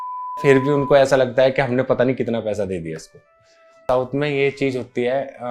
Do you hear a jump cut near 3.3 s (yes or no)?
yes